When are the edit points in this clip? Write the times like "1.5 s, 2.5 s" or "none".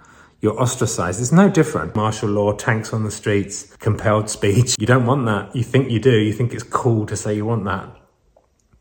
2.0 s, 3.6 s, 4.7 s